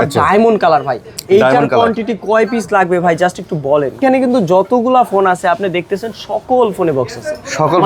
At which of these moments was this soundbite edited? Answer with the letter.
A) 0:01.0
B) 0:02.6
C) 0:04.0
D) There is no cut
C